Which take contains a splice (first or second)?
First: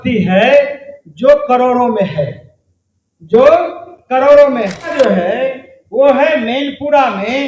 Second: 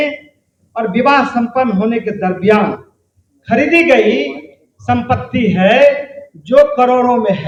first